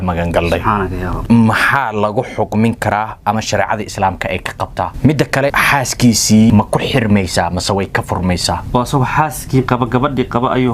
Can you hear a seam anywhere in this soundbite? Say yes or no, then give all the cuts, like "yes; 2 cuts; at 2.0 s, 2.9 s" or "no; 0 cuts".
yes; 5 cuts; at 1.2 s, 4.9 s, 5.5 s, 6.5 s, 8.6 s